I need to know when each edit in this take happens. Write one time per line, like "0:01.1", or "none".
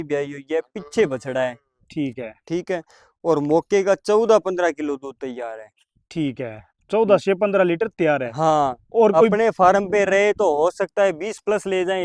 none